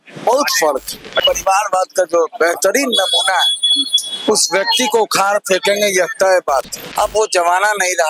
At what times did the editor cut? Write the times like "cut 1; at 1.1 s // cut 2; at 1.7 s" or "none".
cut 1; at 1.2 s // cut 2; at 6.8 s

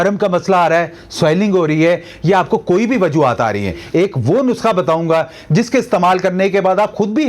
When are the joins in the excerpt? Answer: cut 1; at 3.8 s

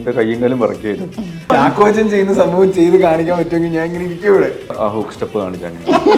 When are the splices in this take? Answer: cut 1; at 1.5 s // cut 2; at 4.8 s

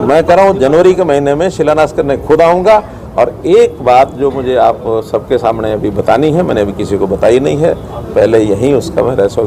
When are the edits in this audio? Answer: none

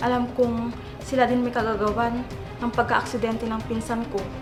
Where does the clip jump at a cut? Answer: none

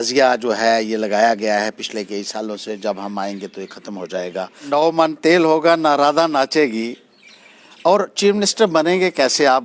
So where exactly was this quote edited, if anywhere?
cut 1; at 4.6 s

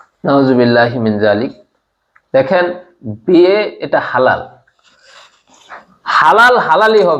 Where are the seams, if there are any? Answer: none

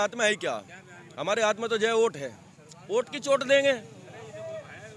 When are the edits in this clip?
none

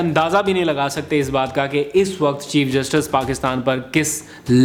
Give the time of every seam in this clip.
none

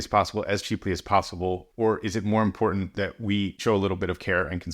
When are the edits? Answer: cut 1; at 1.7 s // cut 2; at 3.6 s

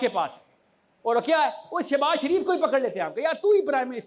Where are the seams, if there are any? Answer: none

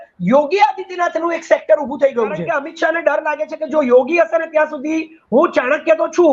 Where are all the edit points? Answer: cut 1; at 2.6 s

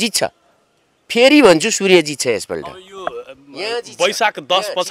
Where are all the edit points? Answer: none

